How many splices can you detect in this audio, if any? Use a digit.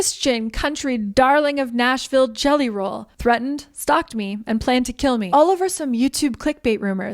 1